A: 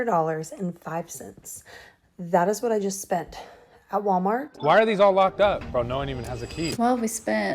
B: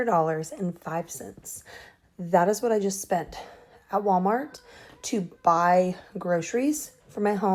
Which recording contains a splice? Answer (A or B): A